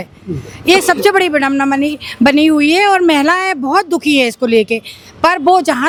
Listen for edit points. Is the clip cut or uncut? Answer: uncut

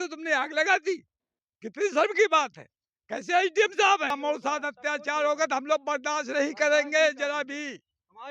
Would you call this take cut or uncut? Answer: cut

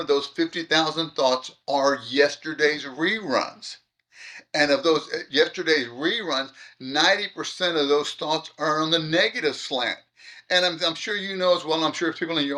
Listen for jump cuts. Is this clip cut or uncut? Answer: uncut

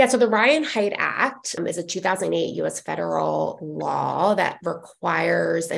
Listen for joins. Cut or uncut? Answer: cut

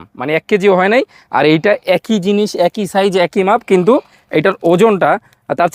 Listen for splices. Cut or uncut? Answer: uncut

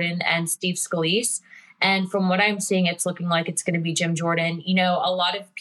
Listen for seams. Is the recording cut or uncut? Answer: uncut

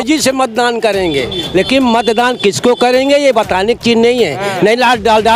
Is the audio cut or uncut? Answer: uncut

